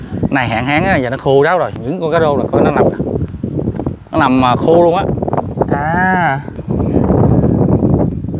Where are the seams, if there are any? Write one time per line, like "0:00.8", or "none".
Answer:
0:01.8
0:06.5